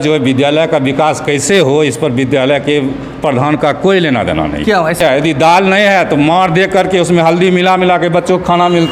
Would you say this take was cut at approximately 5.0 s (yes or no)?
yes